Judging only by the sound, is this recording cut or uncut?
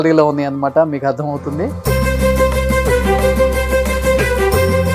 uncut